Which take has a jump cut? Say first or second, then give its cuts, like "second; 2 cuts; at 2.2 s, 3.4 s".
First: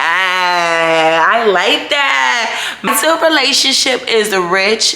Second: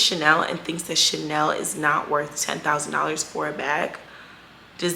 first; 1 cut; at 2.9 s